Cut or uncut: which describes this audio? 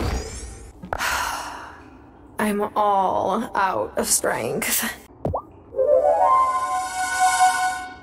cut